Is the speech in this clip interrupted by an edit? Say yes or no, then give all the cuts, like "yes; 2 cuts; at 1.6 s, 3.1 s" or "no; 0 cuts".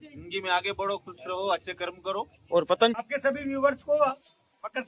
yes; 1 cut; at 2.9 s